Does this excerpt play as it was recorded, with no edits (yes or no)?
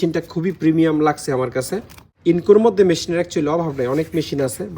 no